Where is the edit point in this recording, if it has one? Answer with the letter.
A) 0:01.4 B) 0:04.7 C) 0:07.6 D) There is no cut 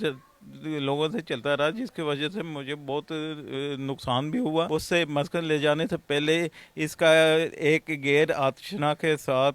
B